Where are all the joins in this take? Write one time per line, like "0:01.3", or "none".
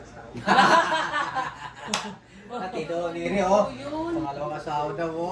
none